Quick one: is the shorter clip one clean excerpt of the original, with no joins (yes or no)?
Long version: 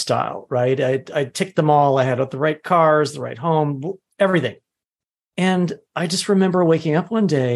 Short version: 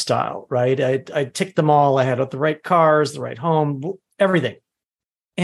yes